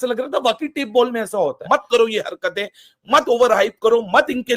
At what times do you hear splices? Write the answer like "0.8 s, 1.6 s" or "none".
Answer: 1.6 s